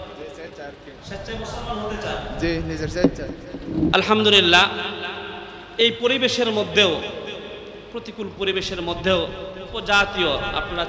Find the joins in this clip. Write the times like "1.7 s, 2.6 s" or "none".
3.9 s, 9.7 s